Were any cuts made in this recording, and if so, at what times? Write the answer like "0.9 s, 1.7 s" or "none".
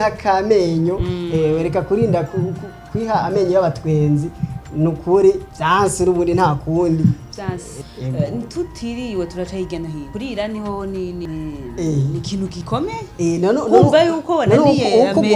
5.5 s, 7.7 s, 10.0 s, 11.2 s, 12.6 s